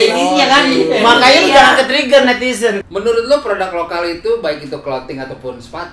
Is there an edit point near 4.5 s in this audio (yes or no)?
no